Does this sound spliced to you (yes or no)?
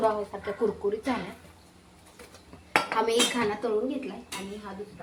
no